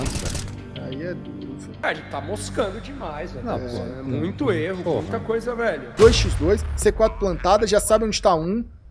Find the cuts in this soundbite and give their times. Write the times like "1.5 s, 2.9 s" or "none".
1.8 s, 5.8 s